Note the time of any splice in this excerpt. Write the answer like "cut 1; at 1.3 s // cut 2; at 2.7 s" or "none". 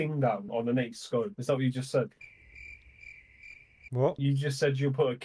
none